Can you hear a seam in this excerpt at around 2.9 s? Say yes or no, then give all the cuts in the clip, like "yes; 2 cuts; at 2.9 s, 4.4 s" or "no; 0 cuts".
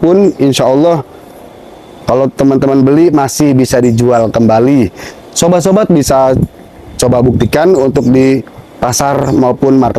no; 0 cuts